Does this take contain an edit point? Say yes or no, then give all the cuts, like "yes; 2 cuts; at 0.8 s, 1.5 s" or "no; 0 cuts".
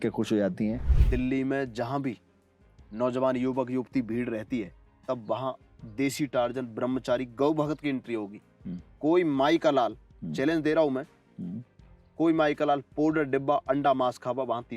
yes; 1 cut; at 0.9 s